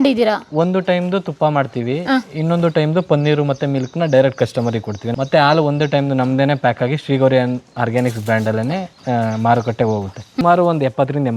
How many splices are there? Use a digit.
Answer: 2